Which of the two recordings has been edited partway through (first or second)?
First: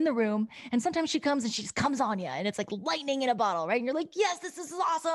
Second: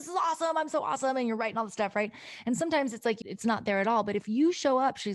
second